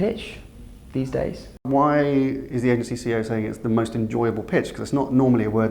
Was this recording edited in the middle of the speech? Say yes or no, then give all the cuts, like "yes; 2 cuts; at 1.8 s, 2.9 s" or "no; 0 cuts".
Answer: yes; 1 cut; at 1.6 s